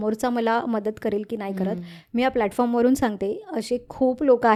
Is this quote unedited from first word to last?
yes; 0 cuts

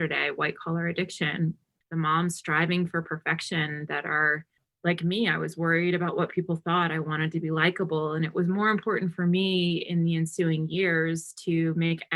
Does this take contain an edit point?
no; 0 cuts

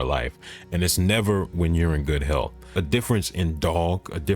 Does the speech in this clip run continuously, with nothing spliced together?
no; 1 cut; at 2.6 s

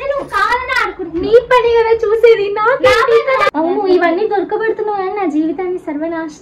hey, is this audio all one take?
no; 1 cut; at 3.5 s

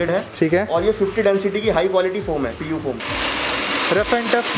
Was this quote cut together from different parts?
yes; 1 cut; at 3.0 s

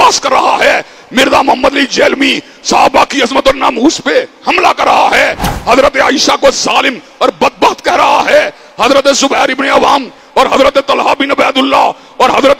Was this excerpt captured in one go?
yes; 0 cuts

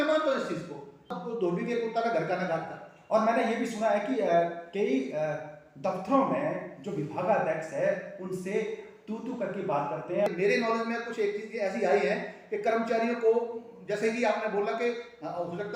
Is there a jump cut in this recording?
yes; 2 cuts; at 1.1 s, 10.3 s

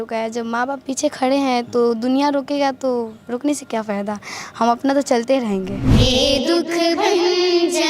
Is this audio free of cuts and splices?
no; 1 cut; at 5.8 s

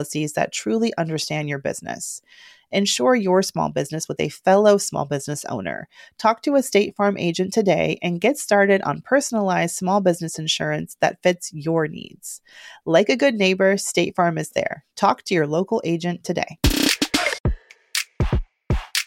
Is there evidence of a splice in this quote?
yes; 1 cut; at 17.4 s

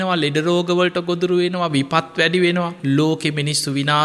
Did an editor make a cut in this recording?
yes; 1 cut; at 2.8 s

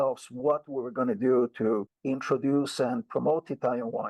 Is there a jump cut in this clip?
no; 0 cuts

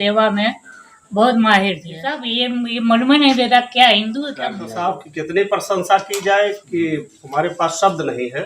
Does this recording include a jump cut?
yes; 2 cuts; at 2.3 s, 4.7 s

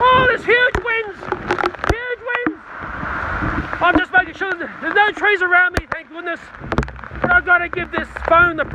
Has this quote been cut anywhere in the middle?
yes; 1 cut; at 6.5 s

